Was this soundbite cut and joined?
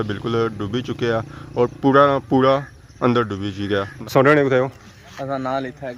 yes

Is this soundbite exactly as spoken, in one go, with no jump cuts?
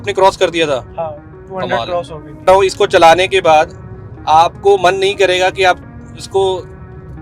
no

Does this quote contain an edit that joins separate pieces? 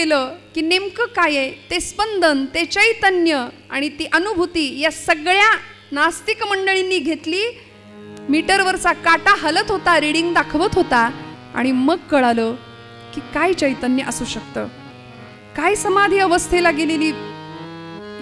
no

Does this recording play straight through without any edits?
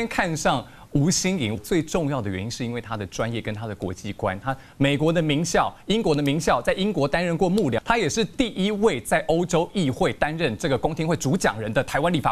no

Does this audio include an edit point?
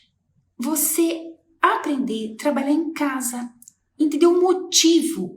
no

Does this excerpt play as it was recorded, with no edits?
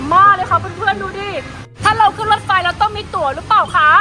no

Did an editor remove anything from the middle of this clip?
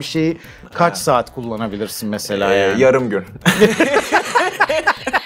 no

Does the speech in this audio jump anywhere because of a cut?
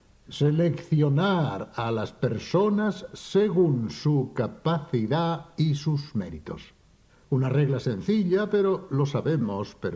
no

